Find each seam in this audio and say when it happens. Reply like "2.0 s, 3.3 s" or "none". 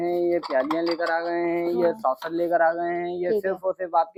none